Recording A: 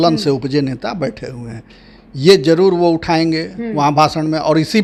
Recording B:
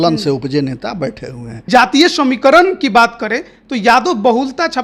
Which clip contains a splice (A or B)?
B